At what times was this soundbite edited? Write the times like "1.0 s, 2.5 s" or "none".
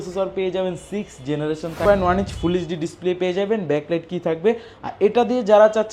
1.8 s

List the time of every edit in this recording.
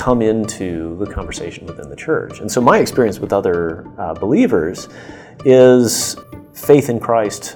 6.1 s

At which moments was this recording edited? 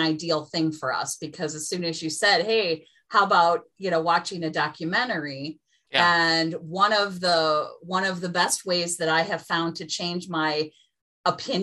none

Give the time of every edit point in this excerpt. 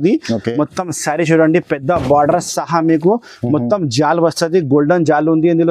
none

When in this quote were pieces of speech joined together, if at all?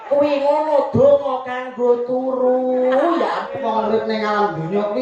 3.5 s

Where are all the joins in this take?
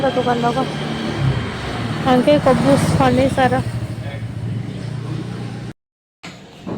5.7 s

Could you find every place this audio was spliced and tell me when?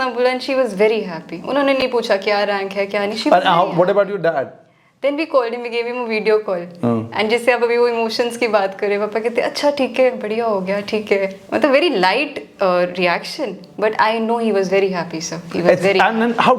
none

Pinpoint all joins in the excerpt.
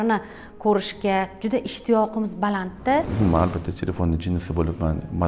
3.1 s

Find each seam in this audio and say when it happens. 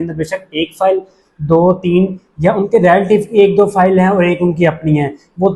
none

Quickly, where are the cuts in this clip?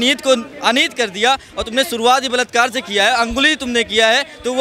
none

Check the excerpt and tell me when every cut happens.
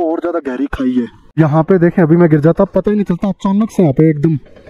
1.2 s

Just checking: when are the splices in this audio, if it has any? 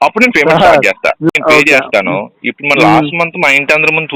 1.3 s

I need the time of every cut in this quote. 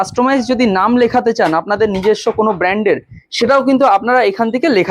none

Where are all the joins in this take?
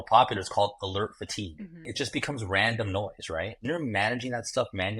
3.6 s

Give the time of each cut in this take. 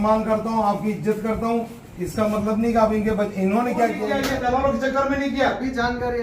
4.2 s

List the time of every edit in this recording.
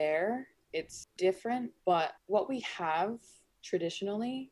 1.0 s

